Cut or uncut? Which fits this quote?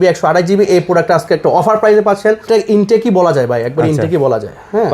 cut